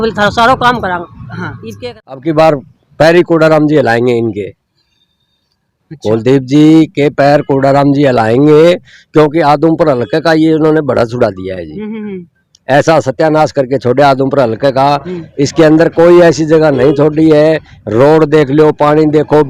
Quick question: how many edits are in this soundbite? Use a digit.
1